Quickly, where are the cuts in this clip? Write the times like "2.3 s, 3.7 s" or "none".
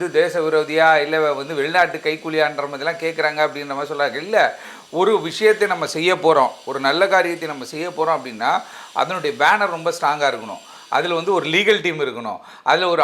none